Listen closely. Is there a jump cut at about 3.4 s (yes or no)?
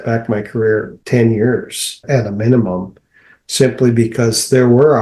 no